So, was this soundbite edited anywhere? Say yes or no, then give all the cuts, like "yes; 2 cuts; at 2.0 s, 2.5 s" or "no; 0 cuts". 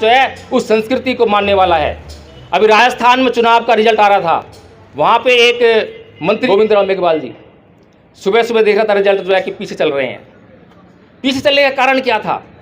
yes; 1 cut; at 6.4 s